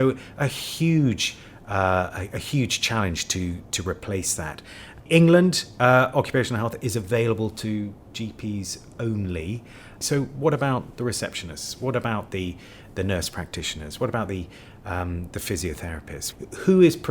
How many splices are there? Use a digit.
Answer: 3